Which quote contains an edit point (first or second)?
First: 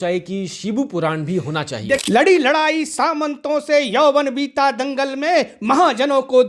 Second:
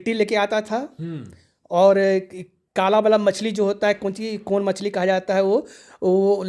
first